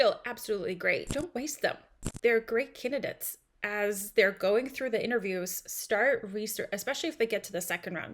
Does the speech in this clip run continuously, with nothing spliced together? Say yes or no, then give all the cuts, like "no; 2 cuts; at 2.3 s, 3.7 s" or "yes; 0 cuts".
no; 1 cut; at 1.1 s